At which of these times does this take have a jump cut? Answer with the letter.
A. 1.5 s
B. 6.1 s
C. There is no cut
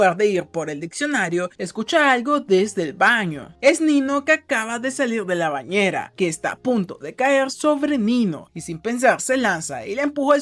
B